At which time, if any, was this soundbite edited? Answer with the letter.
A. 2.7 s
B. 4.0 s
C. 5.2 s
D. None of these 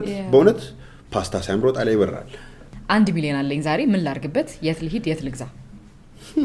A